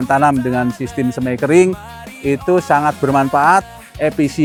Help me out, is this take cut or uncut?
uncut